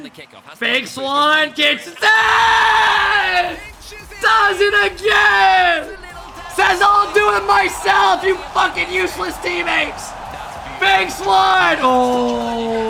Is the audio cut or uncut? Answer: uncut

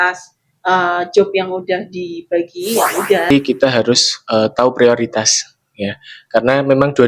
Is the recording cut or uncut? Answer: cut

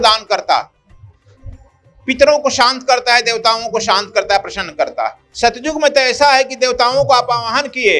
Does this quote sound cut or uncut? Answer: cut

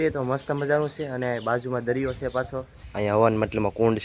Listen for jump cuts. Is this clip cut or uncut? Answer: cut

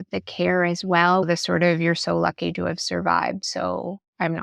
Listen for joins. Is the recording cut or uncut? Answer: cut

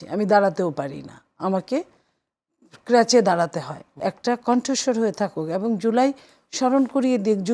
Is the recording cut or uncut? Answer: cut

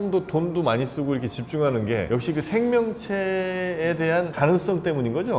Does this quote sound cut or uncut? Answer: uncut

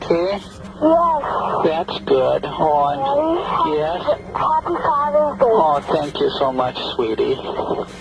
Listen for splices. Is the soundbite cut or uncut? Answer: uncut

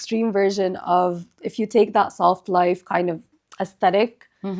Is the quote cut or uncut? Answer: uncut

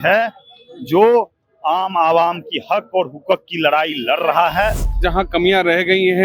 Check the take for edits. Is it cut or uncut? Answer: cut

